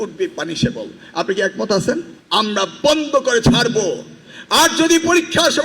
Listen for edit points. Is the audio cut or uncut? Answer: cut